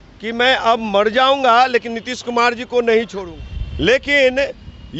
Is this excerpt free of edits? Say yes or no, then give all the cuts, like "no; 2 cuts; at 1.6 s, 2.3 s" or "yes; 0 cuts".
no; 1 cut; at 3.2 s